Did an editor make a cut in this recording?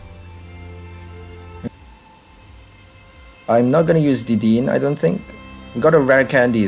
yes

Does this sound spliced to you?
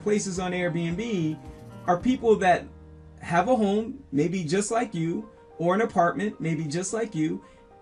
no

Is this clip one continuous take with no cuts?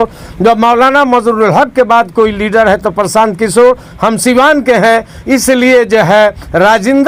yes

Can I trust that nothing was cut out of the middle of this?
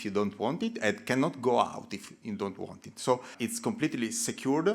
no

